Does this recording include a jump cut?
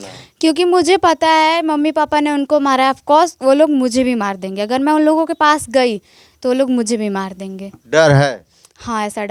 no; 0 cuts

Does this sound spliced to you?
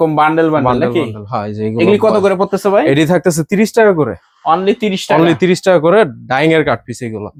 no; 0 cuts

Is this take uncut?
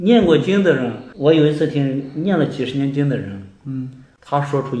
no; 1 cut; at 1.0 s

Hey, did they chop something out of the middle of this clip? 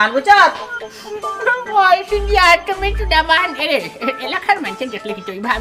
no; 0 cuts

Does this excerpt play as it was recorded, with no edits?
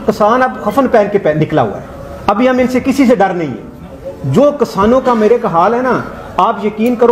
yes; 0 cuts

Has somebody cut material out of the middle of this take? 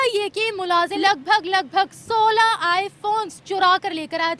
yes; 1 cut; at 1.0 s

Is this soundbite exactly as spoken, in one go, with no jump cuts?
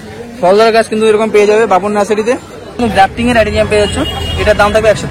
no; 1 cut; at 2.8 s

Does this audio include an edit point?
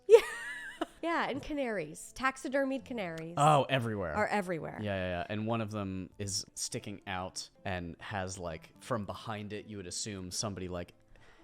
yes; 4 cuts; at 0.9 s, 6.2 s, 7.5 s, 8.7 s

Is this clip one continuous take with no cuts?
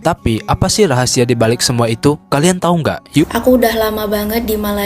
no; 1 cut; at 3.2 s

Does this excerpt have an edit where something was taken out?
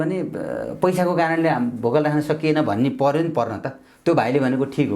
no; 0 cuts

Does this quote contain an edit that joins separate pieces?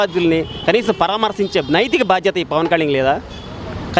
no; 0 cuts

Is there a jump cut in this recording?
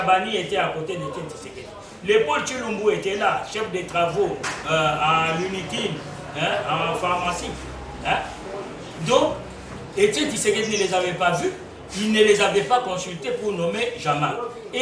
no; 0 cuts

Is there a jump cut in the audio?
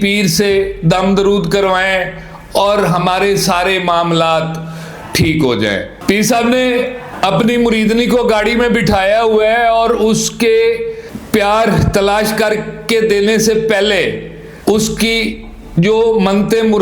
yes; 1 cut; at 5.9 s

